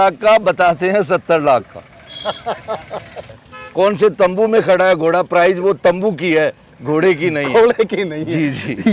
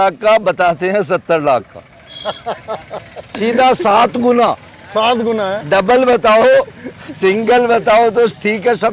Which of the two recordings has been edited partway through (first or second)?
first